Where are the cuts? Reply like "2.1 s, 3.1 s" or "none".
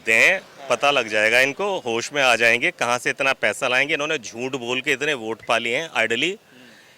none